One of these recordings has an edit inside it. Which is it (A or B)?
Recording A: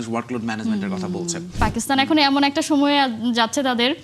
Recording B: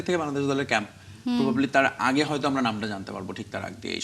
A